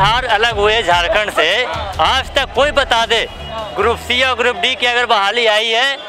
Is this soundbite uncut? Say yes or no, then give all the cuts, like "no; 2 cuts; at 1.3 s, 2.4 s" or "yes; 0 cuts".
yes; 0 cuts